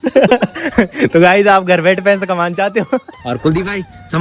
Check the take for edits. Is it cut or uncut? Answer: cut